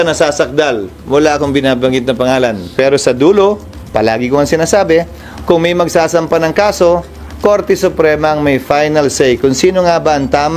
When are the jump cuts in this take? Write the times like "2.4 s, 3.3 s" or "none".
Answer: 2.6 s